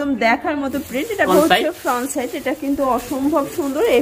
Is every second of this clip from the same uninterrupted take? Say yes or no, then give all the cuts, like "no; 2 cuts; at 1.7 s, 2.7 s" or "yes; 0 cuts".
no; 1 cut; at 1.3 s